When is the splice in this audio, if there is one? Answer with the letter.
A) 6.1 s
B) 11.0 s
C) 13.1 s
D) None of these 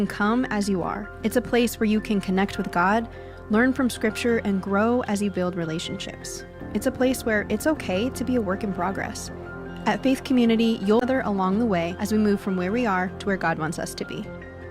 B